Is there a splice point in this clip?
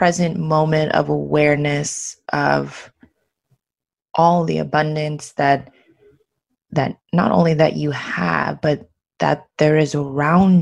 no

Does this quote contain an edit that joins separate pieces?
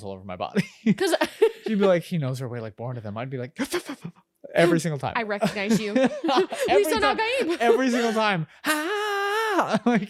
no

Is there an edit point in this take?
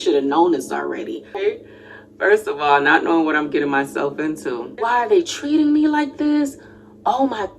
yes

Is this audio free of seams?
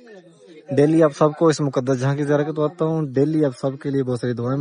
yes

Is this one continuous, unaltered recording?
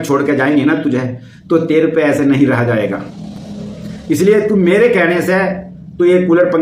yes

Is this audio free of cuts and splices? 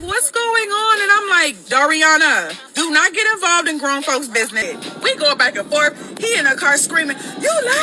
no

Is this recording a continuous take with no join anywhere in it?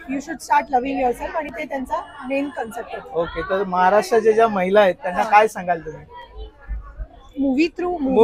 yes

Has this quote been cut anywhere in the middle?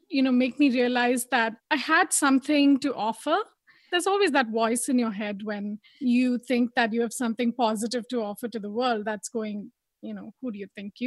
yes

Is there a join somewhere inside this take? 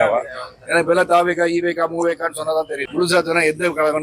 no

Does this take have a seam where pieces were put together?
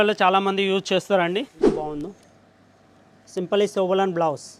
yes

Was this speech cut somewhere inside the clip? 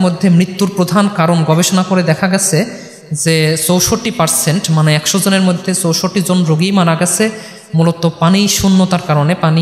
no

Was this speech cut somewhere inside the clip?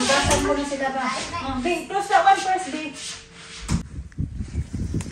yes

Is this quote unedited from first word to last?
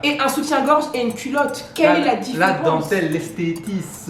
yes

